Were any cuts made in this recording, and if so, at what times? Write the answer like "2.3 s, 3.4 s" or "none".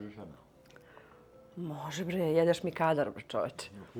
none